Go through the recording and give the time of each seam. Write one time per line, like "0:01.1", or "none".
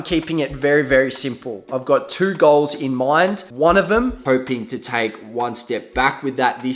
0:03.4
0:04.2